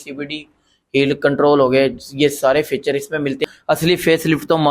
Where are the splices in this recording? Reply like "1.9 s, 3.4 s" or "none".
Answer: 3.4 s